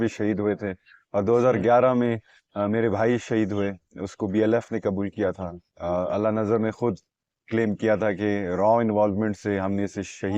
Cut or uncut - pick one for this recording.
uncut